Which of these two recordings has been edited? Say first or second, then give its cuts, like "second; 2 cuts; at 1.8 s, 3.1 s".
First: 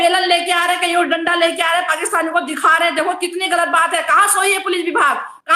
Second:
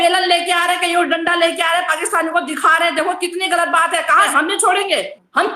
second; 1 cut; at 4.3 s